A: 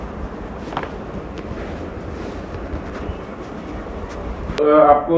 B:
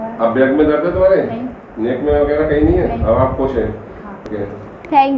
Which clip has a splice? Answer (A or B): B